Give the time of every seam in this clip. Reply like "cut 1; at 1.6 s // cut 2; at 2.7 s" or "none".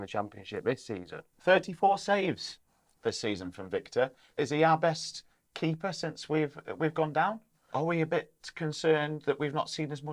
cut 1; at 1.3 s // cut 2; at 4.3 s // cut 3; at 7.5 s